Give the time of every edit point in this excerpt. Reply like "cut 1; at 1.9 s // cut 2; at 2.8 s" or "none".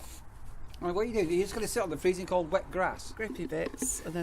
cut 1; at 3.2 s